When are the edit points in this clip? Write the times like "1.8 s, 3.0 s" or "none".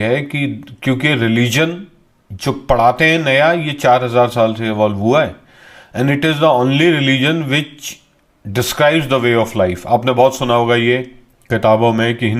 none